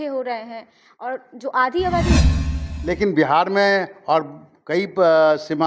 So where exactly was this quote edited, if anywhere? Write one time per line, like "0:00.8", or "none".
0:02.2